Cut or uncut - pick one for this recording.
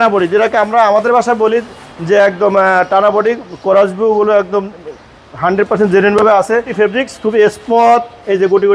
cut